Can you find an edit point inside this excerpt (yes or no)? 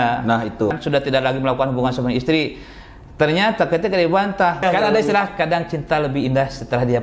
yes